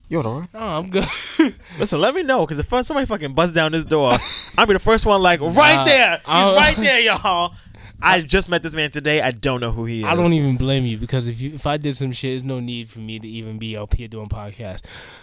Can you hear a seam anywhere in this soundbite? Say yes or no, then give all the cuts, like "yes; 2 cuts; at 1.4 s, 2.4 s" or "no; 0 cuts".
no; 0 cuts